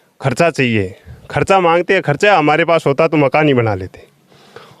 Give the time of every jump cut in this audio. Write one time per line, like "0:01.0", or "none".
none